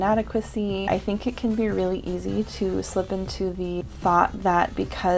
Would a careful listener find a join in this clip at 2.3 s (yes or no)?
no